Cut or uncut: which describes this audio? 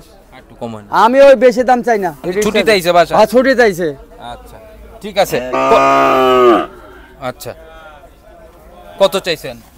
cut